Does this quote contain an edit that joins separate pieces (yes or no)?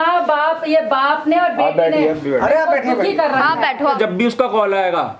yes